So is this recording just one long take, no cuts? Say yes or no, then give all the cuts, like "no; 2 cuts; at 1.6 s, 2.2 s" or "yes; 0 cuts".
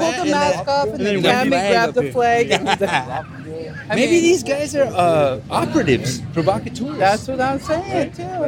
no; 1 cut; at 3.6 s